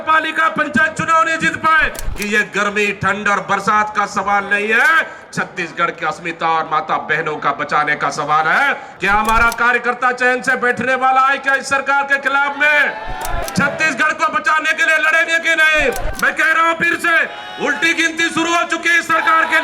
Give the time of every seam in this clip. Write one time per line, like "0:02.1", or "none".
0:02.0
0:08.9
0:13.4
0:16.1